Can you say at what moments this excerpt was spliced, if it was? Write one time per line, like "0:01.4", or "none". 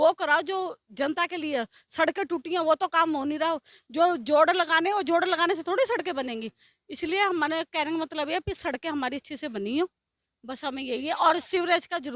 none